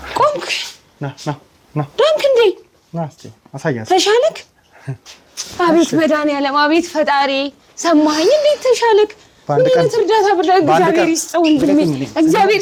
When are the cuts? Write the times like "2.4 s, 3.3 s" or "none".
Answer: none